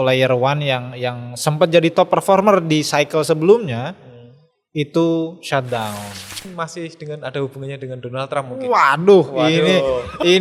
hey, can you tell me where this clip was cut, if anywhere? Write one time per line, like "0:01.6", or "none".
0:06.5